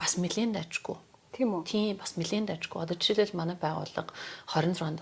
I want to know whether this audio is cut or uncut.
uncut